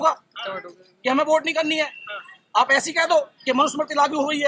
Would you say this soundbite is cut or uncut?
uncut